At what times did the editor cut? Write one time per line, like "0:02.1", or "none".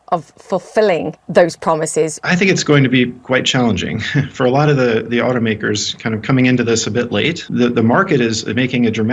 0:01.2
0:02.2
0:04.2
0:07.4